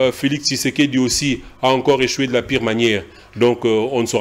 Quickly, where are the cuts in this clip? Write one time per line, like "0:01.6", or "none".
none